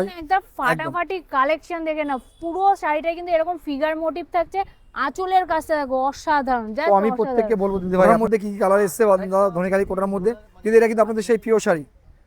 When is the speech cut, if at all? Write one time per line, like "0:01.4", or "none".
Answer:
0:08.1